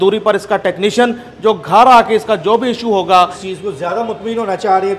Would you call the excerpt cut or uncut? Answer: cut